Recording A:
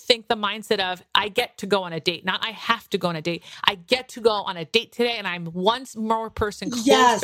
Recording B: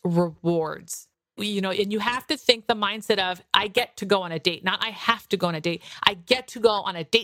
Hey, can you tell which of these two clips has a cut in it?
B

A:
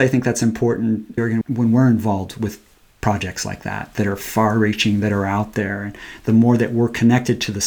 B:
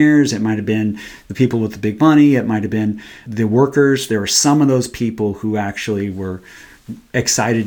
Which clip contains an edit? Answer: A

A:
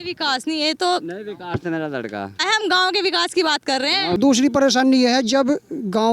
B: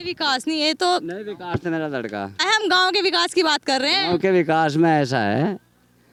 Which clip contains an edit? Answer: A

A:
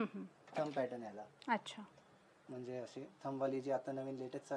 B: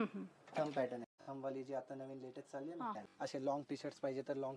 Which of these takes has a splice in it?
B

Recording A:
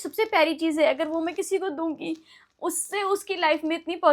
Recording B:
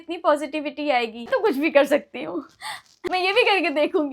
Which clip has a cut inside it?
B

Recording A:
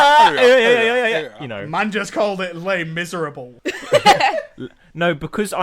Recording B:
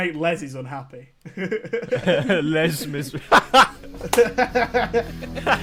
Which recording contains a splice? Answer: A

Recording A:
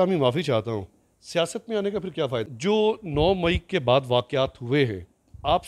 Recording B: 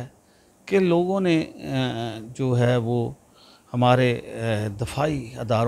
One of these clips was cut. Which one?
A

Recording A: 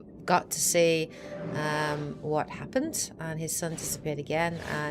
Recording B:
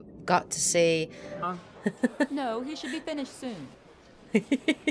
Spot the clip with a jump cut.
A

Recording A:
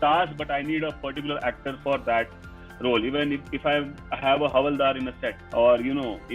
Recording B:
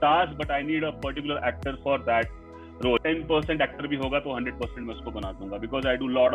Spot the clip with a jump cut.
B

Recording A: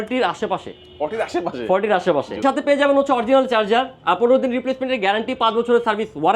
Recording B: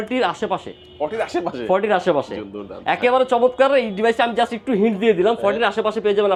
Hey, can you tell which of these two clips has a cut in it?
A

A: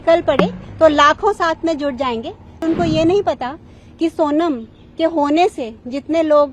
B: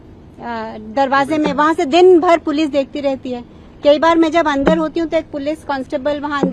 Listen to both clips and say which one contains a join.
A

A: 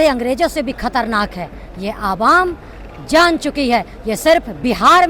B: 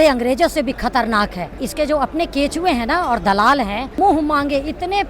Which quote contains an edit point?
B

